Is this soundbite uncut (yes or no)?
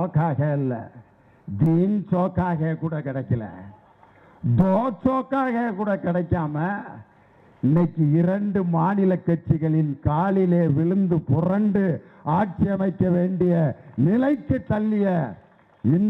yes